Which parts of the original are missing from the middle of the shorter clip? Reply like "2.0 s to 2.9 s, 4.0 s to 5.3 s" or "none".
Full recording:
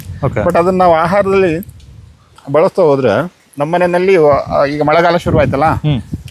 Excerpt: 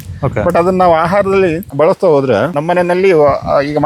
1.6 s to 2.4 s, 3.3 s to 3.6 s